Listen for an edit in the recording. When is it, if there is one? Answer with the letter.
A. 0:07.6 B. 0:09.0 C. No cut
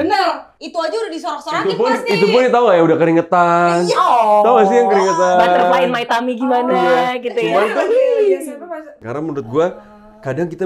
B